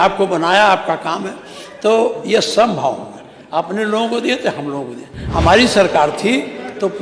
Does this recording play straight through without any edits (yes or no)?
no